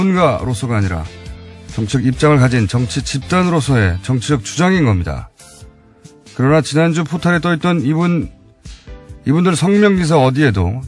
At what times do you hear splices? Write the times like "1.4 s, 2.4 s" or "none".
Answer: none